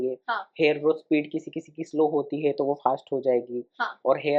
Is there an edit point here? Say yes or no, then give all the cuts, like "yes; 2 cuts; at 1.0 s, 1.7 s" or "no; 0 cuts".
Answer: no; 0 cuts